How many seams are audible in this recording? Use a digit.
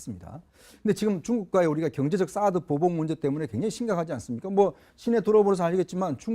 1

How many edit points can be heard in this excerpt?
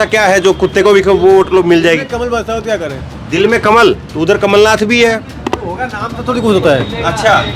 0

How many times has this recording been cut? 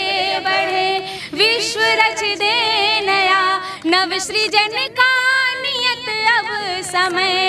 0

